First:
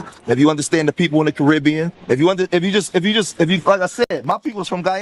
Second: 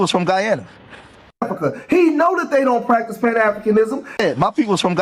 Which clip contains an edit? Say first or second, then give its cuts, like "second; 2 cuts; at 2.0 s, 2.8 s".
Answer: second; 2 cuts; at 1.3 s, 4.1 s